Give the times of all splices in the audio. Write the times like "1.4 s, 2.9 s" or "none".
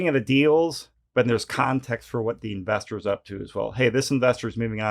1.7 s